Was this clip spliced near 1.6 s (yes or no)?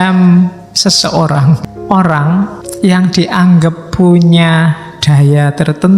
yes